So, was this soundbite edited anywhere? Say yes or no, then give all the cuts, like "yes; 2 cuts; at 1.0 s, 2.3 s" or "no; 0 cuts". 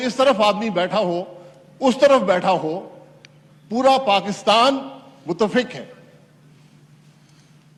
no; 0 cuts